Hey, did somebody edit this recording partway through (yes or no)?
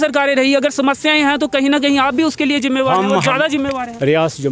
no